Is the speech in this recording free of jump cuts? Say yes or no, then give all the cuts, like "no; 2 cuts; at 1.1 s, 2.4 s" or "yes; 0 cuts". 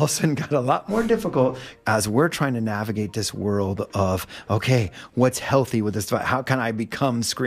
no; 1 cut; at 1.7 s